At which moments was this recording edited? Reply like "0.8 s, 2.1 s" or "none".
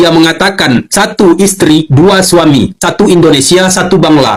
none